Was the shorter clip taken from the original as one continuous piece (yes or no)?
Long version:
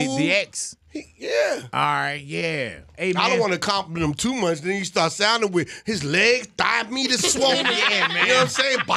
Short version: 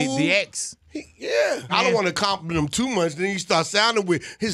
no